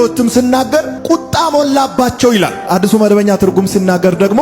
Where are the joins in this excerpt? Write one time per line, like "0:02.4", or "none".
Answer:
0:00.9